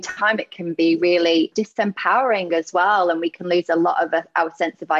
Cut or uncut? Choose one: cut